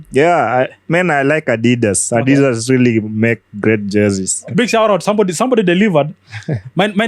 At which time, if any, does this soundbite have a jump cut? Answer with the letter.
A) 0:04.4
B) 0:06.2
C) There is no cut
A